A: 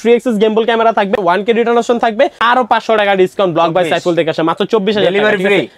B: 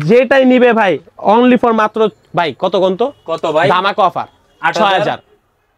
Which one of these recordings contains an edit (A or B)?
A